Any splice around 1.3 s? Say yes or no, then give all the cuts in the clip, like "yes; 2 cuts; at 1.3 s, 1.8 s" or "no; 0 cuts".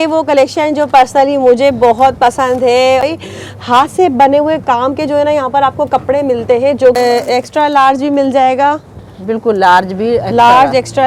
no; 2 cuts; at 3.0 s, 7.0 s